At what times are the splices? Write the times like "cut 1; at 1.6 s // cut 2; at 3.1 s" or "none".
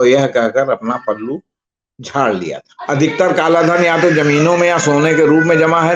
cut 1; at 2.7 s